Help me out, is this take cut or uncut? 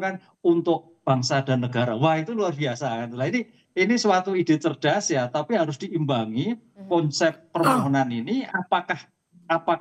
uncut